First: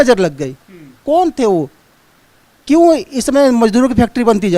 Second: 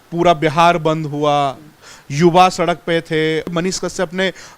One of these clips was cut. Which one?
second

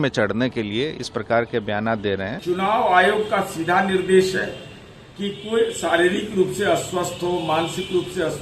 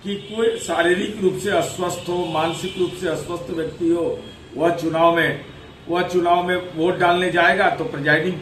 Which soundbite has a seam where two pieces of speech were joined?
first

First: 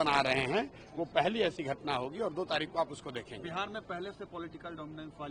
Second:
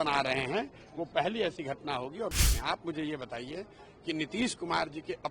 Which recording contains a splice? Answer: second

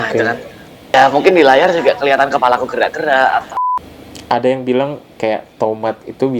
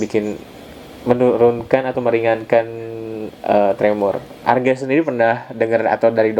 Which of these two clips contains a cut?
first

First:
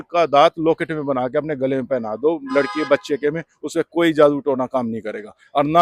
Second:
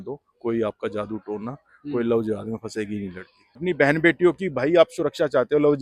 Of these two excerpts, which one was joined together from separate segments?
second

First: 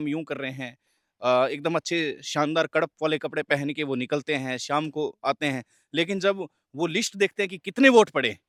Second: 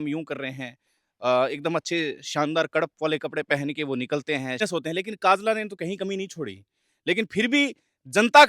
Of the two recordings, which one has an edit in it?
second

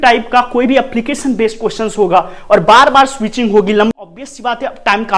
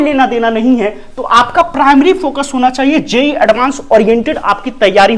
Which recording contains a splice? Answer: first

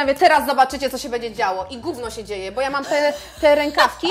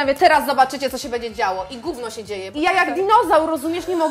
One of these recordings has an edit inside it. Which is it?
second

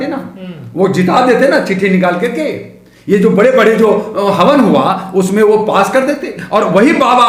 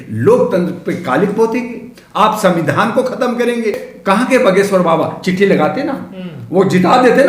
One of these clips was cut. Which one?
second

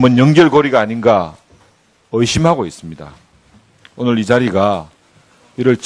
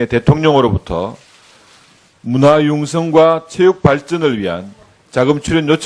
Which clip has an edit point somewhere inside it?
second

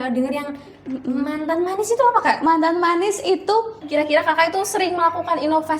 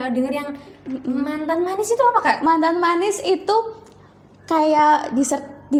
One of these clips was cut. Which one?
first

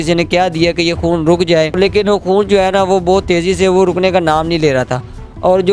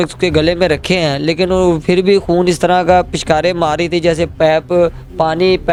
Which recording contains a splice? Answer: first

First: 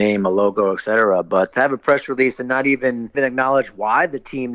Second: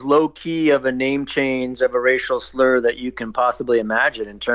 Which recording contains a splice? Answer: first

